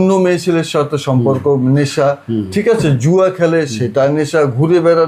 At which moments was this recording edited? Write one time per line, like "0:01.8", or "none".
none